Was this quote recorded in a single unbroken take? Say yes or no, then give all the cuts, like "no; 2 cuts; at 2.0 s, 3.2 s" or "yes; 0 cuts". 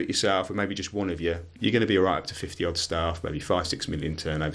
yes; 0 cuts